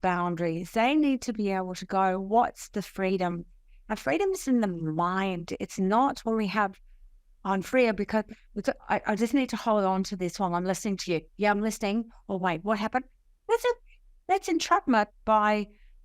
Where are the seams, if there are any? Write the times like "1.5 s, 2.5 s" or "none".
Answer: none